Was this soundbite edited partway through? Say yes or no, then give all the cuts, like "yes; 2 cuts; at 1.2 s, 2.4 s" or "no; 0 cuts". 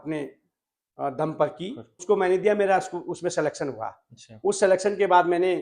yes; 1 cut; at 2.0 s